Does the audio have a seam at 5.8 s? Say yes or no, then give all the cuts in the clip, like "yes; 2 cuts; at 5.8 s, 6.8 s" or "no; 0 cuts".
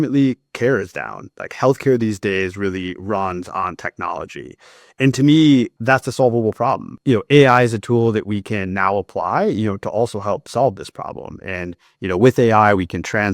yes; 2 cuts; at 5.8 s, 6.9 s